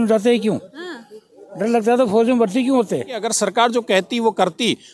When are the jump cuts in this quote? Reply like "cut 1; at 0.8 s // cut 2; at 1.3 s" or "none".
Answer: cut 1; at 3.2 s